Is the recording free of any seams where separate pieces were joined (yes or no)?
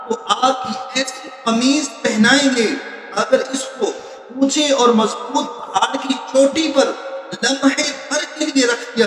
yes